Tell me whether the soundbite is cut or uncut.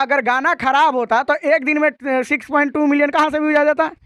uncut